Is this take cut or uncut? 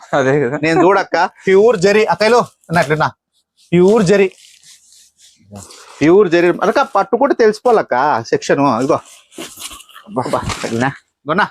uncut